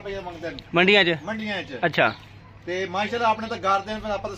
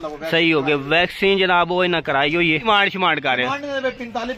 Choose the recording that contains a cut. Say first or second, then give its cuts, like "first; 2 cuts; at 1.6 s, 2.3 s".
second; 1 cut; at 2.6 s